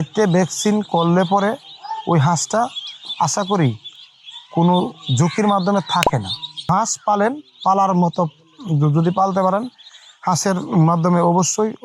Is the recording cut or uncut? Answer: cut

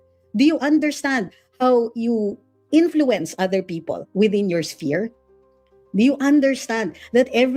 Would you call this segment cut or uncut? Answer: uncut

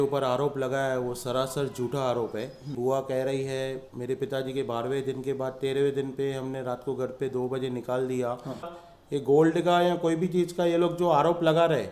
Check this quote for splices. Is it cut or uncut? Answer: cut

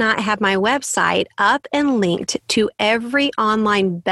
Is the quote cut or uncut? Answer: uncut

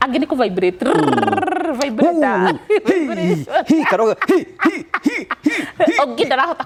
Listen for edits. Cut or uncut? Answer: uncut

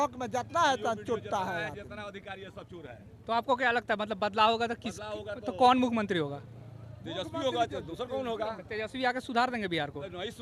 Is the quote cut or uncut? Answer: uncut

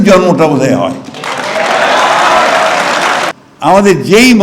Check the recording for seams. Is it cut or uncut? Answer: cut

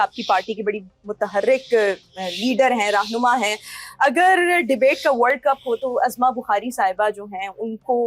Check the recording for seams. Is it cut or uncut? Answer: uncut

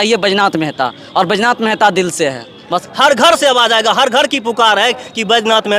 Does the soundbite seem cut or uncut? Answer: cut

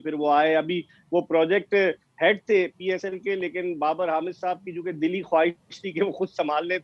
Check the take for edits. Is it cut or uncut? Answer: uncut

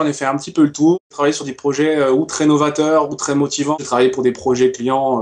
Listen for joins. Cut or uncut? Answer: cut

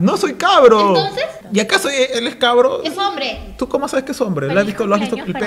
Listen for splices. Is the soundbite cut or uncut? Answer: cut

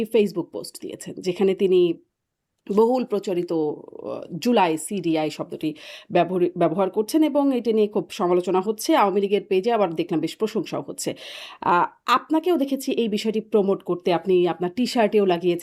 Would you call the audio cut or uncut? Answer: uncut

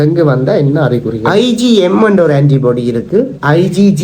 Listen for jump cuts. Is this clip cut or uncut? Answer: cut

